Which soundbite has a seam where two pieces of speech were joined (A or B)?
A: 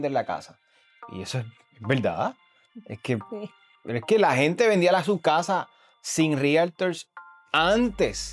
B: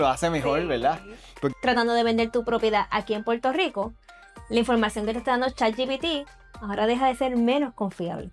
B